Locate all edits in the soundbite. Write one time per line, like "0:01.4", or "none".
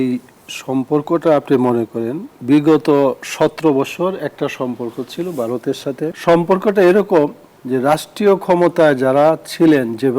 0:02.3
0:06.2